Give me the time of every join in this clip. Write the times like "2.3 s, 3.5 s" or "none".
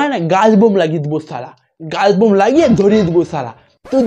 1.4 s